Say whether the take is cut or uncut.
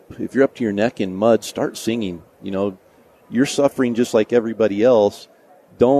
uncut